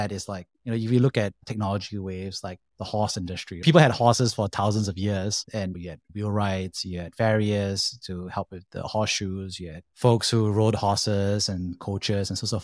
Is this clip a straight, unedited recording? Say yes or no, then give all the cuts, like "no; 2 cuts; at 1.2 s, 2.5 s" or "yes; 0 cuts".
no; 1 cut; at 3.6 s